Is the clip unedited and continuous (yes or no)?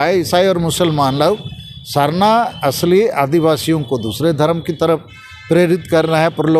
yes